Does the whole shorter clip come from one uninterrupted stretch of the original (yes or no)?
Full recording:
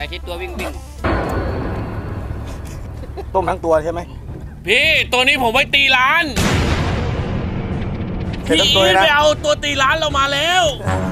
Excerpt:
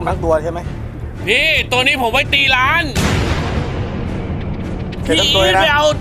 yes